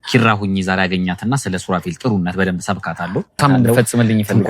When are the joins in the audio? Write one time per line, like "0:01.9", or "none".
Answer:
0:03.4